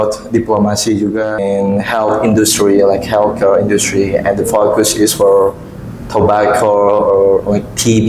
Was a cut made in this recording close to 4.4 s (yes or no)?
no